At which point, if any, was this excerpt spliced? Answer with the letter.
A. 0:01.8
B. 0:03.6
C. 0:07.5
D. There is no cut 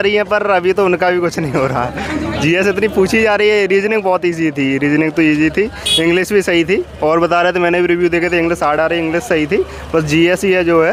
D